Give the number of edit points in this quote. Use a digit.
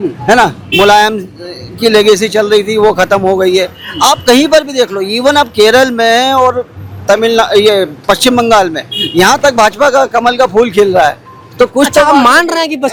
0